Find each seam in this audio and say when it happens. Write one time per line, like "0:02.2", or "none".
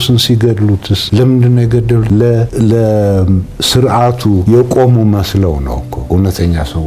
0:01.0
0:02.4
0:04.4
0:05.9